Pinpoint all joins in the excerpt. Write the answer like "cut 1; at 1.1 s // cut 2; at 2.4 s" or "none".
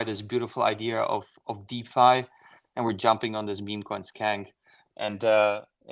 none